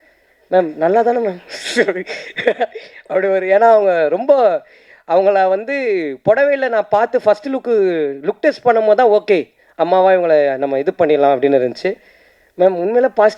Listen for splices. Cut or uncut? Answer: uncut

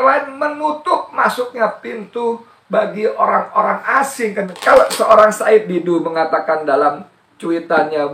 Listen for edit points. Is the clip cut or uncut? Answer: cut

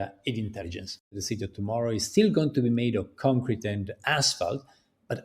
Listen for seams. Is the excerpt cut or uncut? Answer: cut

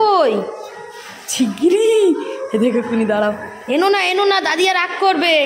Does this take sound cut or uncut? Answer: uncut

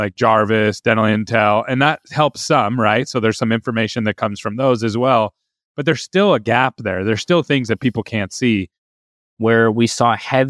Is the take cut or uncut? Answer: cut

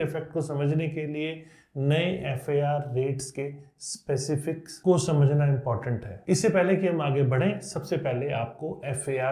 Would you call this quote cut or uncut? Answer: uncut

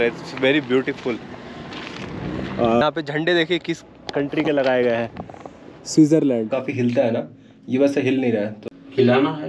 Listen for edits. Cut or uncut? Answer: cut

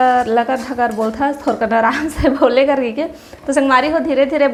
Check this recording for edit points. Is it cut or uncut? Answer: uncut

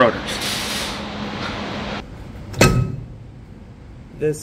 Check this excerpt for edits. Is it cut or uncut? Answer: cut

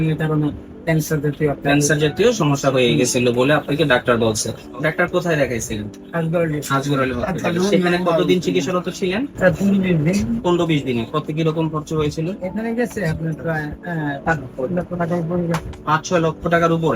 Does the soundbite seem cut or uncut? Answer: uncut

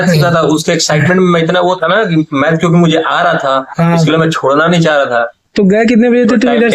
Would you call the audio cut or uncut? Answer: uncut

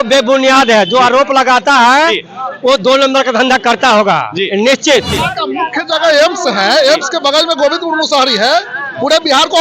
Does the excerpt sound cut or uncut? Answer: cut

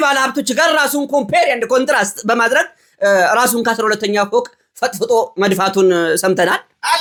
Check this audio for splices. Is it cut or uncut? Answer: uncut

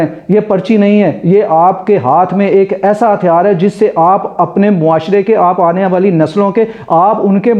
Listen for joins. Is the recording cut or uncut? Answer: uncut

